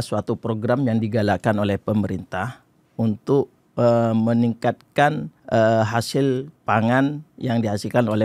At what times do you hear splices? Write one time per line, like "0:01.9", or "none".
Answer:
0:05.3
0:06.5